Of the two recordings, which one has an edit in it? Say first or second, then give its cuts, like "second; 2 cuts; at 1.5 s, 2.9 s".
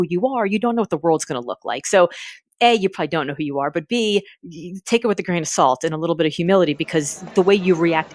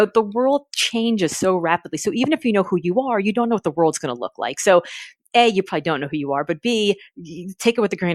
first; 1 cut; at 7.2 s